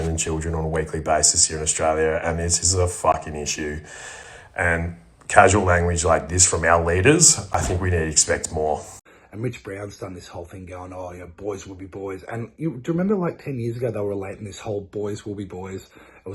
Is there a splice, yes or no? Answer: no